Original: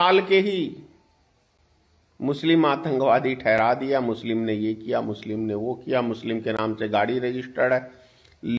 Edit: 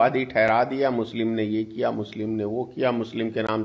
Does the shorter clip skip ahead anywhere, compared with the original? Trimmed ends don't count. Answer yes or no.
no